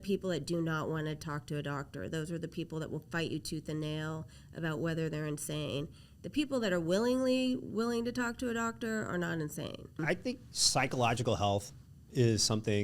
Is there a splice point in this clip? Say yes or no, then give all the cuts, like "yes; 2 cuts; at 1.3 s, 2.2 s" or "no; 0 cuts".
yes; 1 cut; at 10.0 s